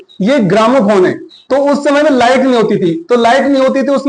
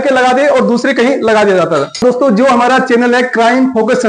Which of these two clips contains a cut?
second; 1 cut; at 2.0 s

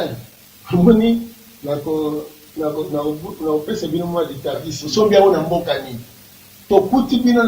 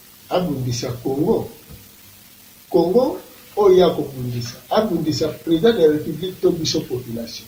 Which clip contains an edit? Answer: first; 1 cut; at 4.7 s

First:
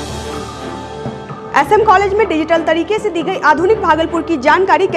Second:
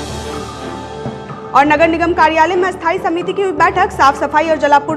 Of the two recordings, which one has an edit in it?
first; 1 cut; at 1.3 s

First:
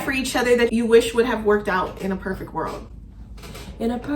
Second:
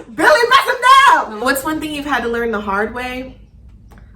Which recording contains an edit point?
second; 1 cut; at 1.3 s

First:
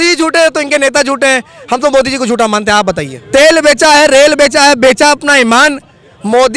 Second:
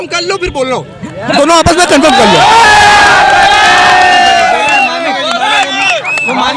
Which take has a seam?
first; 1 cut; at 3.1 s

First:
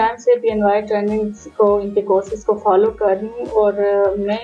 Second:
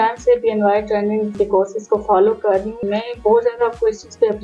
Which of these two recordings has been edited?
second; 2 cuts; at 1.3 s, 2.8 s

